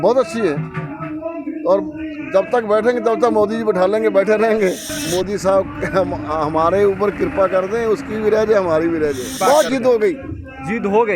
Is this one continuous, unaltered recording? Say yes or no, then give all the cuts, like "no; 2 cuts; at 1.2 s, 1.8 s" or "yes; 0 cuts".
no; 2 cuts; at 4.9 s, 9.3 s